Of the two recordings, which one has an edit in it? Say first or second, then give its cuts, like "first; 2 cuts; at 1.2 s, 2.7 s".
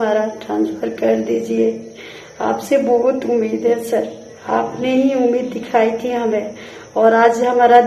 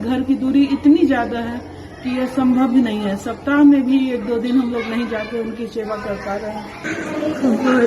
second; 1 cut; at 6.8 s